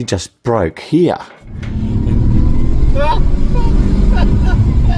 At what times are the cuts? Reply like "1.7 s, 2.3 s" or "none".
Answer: 1.6 s